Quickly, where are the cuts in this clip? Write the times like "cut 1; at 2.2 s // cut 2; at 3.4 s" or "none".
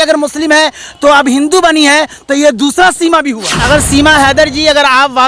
cut 1; at 3.5 s